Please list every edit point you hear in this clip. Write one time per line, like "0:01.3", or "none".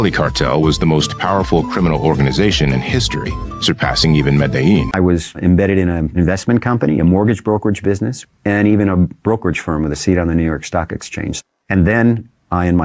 0:04.9